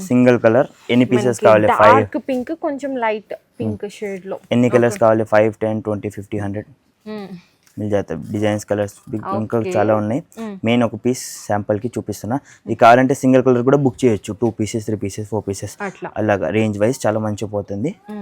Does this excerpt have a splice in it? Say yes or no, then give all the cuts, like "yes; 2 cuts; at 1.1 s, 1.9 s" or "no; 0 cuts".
no; 0 cuts